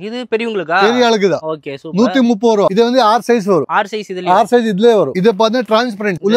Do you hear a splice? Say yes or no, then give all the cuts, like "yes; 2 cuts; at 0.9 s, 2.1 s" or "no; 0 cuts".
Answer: no; 0 cuts